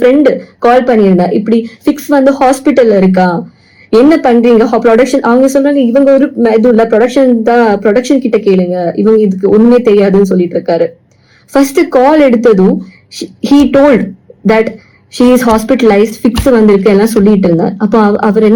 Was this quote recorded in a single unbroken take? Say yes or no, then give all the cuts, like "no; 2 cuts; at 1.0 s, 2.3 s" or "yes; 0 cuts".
yes; 0 cuts